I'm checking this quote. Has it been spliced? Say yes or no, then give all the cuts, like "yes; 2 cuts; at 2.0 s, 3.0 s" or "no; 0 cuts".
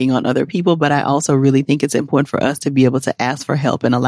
no; 0 cuts